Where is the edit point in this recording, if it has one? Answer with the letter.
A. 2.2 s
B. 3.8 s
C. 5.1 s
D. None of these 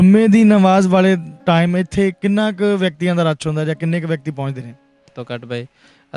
C